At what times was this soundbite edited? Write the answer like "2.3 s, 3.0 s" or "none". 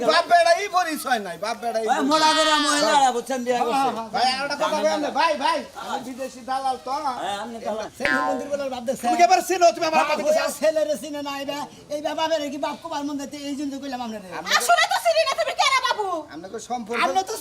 7.9 s